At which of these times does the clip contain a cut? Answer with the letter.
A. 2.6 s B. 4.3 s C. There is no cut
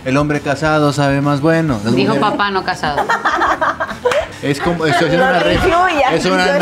B